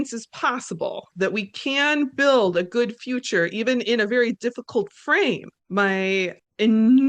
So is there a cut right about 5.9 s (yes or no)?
yes